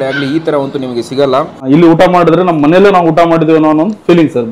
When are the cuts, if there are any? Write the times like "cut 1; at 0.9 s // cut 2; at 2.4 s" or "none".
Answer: cut 1; at 1.6 s